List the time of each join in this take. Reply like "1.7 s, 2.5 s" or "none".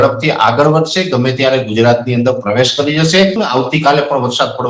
3.4 s